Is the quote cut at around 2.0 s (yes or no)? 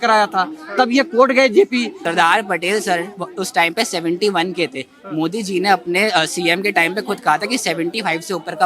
yes